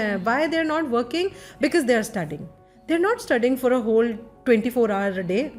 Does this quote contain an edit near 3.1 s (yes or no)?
no